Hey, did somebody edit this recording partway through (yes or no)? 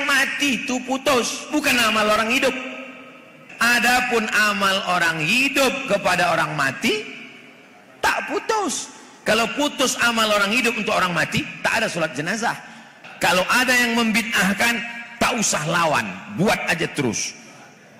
yes